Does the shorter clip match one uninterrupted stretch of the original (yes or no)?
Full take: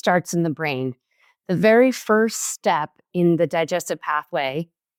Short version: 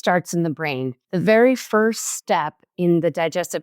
no